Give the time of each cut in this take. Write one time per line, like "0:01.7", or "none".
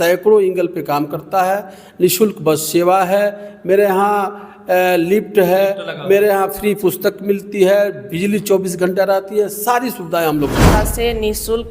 0:10.7